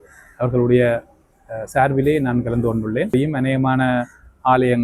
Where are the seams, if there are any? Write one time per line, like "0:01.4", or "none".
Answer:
0:03.1